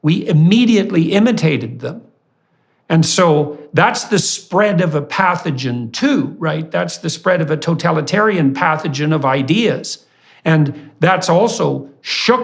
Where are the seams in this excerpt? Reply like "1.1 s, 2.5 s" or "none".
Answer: none